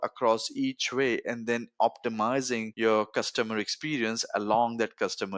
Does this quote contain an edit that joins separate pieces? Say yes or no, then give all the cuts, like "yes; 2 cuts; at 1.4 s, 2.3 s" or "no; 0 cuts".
yes; 1 cut; at 2.7 s